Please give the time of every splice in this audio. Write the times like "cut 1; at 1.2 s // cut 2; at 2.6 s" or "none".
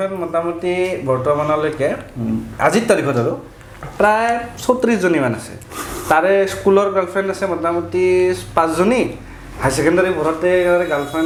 none

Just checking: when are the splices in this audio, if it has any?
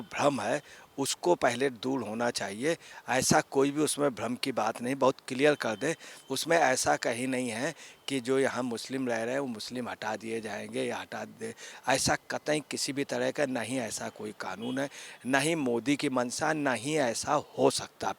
none

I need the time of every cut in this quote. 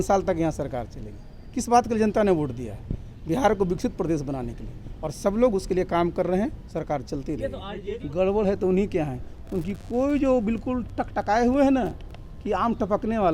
cut 1; at 7.7 s

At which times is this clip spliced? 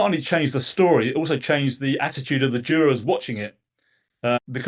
none

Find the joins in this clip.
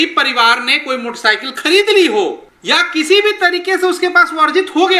cut 1; at 2.5 s

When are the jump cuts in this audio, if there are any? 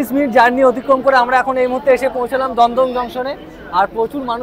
none

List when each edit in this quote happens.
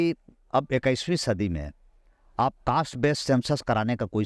none

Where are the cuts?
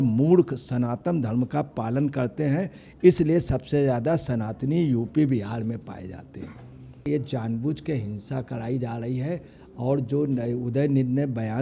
cut 1; at 7.0 s

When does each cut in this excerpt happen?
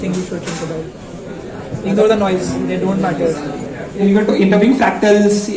cut 1; at 4.0 s

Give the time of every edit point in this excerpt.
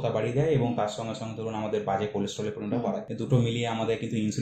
cut 1; at 3.1 s

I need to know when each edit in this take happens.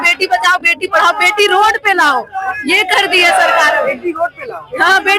none

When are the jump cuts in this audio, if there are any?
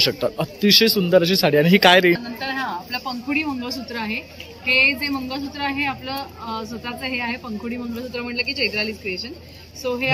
cut 1; at 2.2 s

